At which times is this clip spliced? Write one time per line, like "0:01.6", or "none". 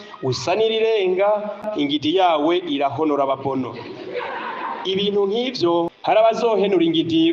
0:01.7
0:06.1